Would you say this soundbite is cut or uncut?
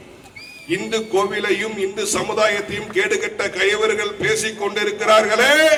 uncut